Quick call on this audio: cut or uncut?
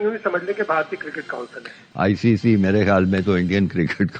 cut